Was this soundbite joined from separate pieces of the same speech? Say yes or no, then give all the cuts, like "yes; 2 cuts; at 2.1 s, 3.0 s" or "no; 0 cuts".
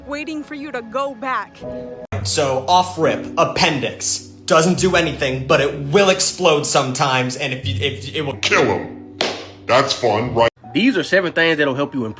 yes; 2 cuts; at 2.4 s, 10.5 s